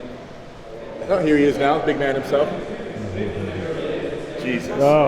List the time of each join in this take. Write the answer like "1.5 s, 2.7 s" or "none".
0.9 s